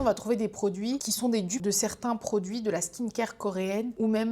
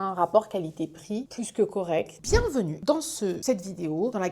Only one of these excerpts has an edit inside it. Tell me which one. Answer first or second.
second